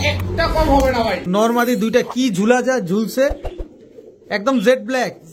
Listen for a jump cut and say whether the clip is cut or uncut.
cut